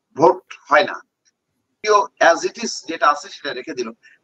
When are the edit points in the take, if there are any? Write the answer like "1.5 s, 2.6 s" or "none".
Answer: 1.8 s